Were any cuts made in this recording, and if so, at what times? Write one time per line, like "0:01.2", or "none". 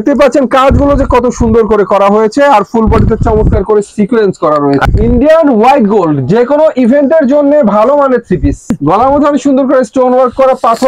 0:04.8
0:08.8